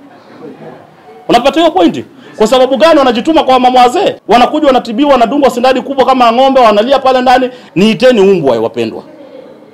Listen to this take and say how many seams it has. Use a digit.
2